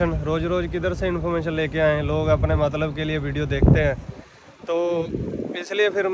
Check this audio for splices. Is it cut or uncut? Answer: uncut